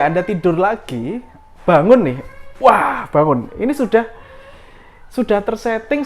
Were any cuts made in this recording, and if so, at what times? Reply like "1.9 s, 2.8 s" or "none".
none